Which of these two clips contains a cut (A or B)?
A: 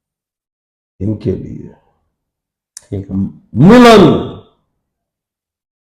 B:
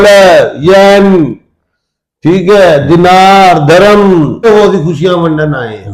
B